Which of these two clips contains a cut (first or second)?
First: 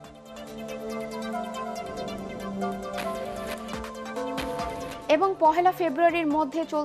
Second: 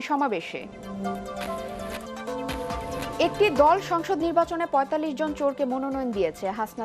second